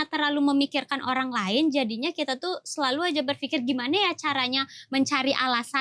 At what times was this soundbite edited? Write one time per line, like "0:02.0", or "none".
none